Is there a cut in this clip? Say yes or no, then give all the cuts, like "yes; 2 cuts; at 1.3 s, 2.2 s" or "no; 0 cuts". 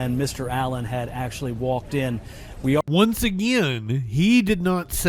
no; 0 cuts